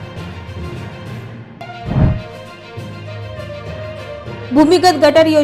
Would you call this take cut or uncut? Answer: uncut